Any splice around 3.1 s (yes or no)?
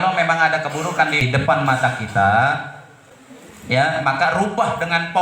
no